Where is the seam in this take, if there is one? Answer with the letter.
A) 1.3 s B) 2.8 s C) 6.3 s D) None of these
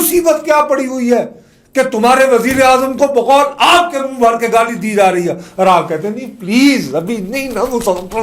D